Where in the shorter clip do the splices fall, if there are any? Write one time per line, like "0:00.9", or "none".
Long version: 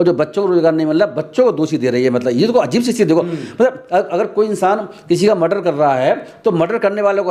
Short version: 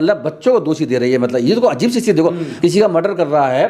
0:02.5